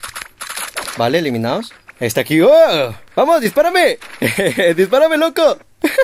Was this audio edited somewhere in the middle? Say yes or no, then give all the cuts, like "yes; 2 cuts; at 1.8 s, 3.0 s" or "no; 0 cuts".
yes; 1 cut; at 1.8 s